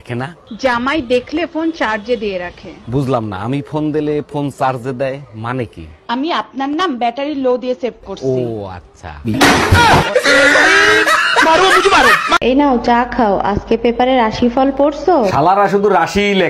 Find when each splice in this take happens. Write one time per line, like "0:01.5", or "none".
none